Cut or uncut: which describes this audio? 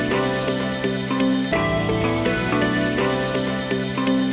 uncut